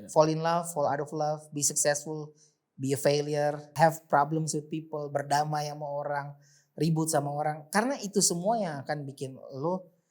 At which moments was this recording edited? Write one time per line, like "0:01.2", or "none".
0:03.7

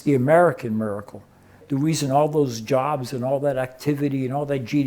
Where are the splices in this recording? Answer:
0:01.6

